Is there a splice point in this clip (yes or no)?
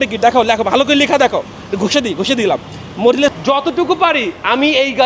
yes